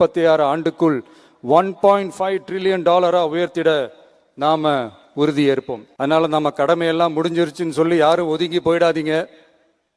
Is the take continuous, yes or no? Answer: no